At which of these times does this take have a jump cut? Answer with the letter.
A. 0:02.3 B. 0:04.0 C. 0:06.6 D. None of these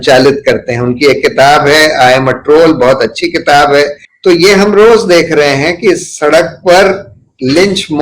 B